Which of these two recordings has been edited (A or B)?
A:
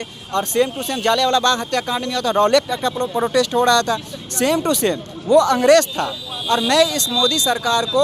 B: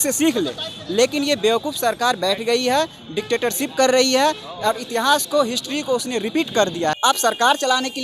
B